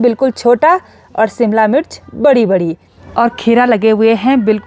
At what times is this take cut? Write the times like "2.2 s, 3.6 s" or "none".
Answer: 3.0 s